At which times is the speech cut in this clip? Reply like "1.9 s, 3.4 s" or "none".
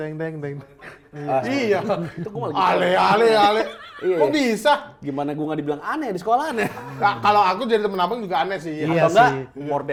none